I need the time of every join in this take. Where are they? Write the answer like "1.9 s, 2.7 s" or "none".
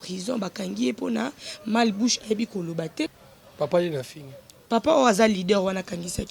3.2 s